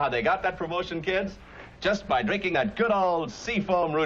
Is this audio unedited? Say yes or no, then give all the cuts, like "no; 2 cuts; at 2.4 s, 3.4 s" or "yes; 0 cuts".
no; 1 cut; at 1.3 s